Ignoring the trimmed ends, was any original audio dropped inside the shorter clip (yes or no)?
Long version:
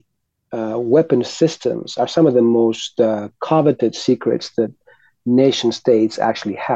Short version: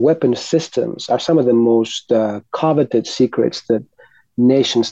no